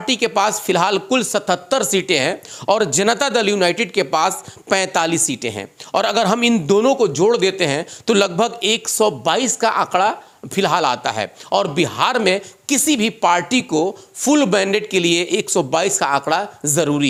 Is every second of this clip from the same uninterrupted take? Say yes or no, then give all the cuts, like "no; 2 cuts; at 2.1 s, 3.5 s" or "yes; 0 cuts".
yes; 0 cuts